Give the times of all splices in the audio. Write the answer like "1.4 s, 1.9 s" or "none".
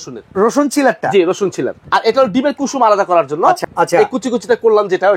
1.8 s, 3.6 s